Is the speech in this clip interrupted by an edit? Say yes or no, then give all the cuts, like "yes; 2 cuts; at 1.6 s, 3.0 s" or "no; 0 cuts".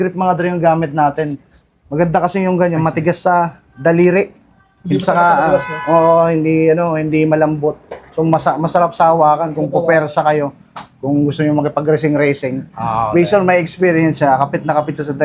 no; 0 cuts